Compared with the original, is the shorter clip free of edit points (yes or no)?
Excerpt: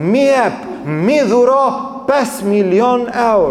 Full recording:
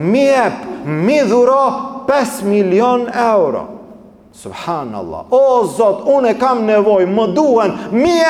yes